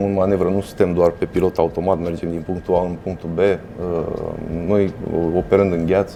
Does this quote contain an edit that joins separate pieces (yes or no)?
no